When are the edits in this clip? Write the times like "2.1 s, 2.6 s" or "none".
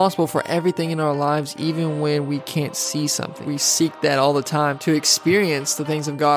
3.4 s, 4.8 s